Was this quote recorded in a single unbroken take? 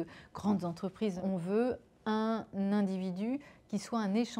no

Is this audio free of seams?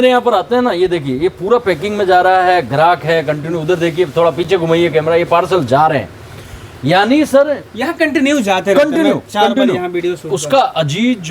yes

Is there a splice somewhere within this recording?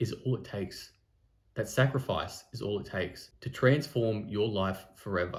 no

